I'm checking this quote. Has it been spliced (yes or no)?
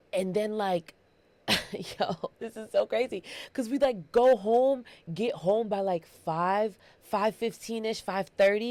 no